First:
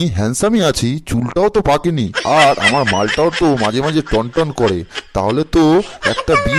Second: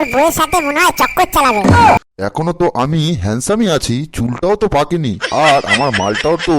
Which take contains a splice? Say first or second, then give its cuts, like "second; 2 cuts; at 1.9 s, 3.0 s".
second; 1 cut; at 2.0 s